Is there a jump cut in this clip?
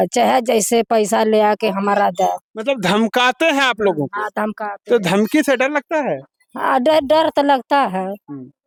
no; 0 cuts

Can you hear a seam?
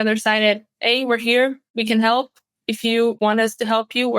yes; 2 cuts; at 1.7 s, 3.2 s

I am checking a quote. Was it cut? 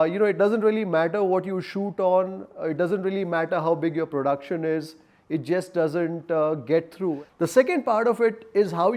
yes; 1 cut; at 7.2 s

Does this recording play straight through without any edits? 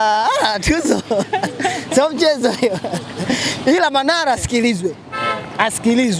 yes; 0 cuts

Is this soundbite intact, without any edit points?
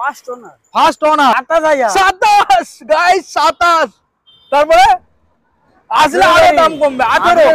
no; 1 cut; at 1.3 s

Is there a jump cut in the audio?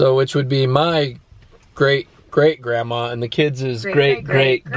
no; 0 cuts

